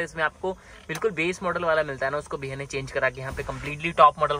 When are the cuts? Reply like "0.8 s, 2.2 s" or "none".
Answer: none